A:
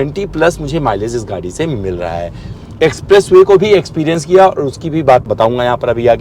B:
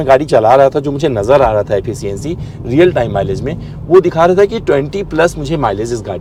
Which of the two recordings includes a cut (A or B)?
A